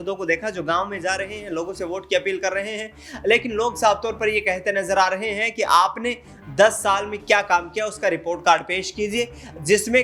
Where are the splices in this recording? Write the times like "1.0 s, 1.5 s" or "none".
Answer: none